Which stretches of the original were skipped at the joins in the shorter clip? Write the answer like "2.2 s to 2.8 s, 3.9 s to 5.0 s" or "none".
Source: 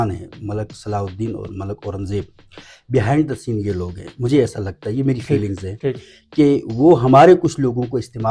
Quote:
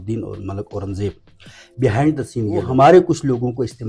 3.8 s to 7.0 s